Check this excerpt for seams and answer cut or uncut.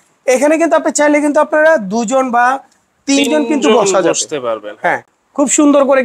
uncut